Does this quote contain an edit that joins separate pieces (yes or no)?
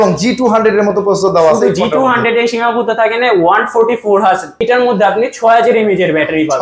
yes